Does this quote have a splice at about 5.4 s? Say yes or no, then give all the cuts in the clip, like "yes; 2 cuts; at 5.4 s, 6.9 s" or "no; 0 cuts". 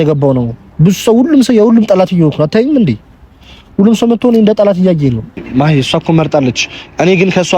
yes; 1 cut; at 5.4 s